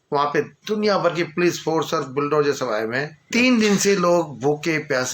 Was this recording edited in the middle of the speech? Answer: yes; 1 cut; at 3.2 s

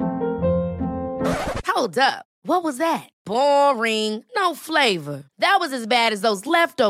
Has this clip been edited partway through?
no; 0 cuts

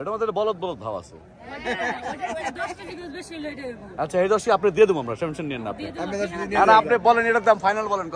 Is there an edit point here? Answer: no; 0 cuts

